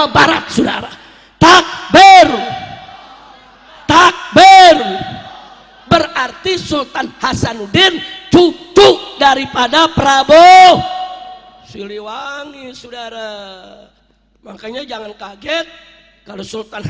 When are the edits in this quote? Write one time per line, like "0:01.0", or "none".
none

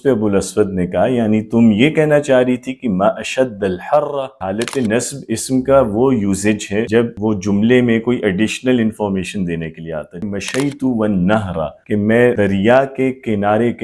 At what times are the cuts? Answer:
0:04.3
0:07.0
0:10.2
0:12.1

